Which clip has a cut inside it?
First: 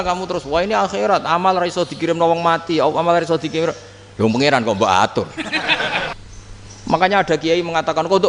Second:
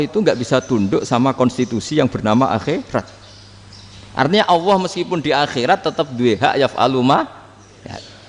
first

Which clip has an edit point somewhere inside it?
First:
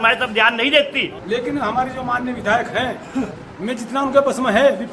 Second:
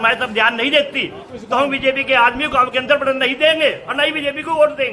first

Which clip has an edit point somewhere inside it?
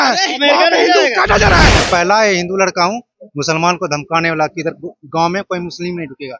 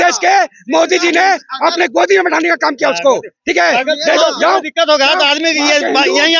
first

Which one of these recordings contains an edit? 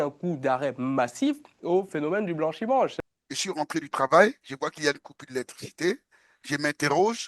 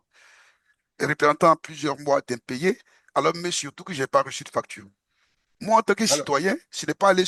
first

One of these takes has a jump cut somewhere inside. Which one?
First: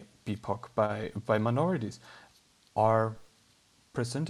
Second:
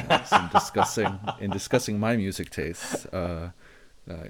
second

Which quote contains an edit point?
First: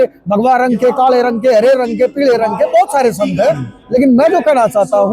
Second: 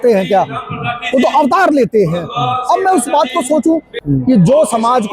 second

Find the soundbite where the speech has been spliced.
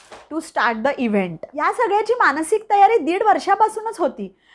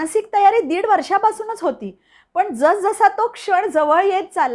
first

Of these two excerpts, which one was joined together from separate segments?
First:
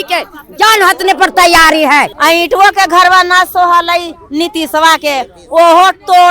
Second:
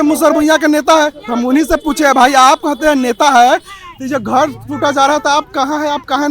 first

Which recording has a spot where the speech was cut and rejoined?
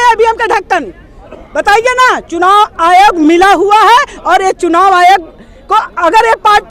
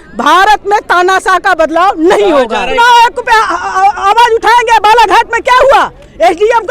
second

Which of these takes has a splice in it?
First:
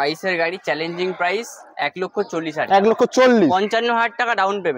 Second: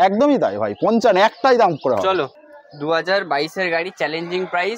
second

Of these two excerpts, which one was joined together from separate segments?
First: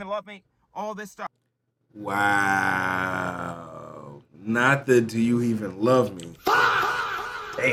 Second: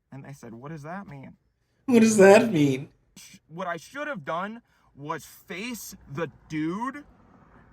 second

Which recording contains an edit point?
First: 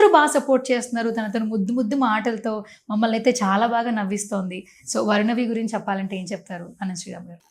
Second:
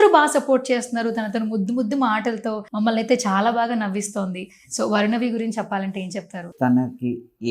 second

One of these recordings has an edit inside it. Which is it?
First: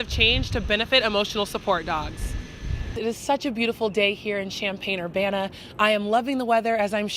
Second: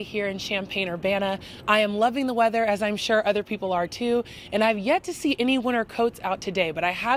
first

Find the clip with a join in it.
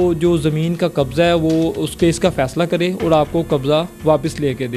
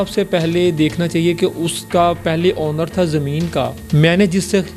second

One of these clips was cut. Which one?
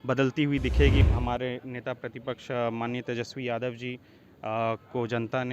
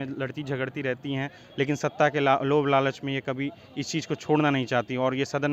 first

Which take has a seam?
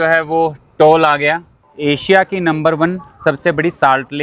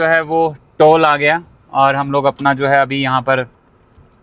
first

